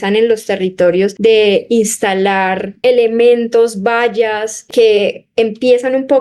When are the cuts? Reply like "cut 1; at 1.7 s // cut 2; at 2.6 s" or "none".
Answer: cut 1; at 1.1 s // cut 2; at 2.7 s // cut 3; at 4.7 s